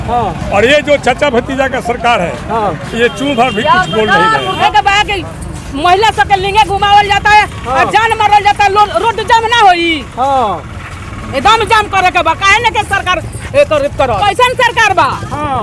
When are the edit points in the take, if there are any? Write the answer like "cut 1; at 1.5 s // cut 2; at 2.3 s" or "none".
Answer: cut 1; at 4.6 s // cut 2; at 14.2 s